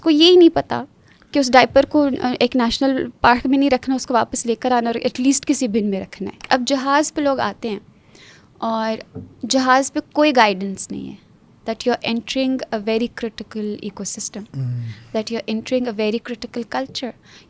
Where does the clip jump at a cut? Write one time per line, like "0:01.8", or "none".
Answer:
0:06.3